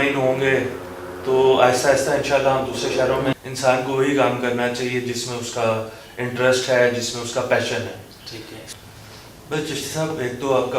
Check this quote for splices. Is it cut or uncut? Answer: cut